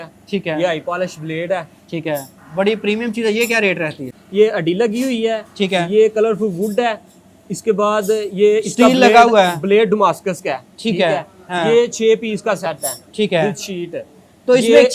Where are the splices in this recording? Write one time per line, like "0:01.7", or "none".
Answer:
0:02.4
0:04.2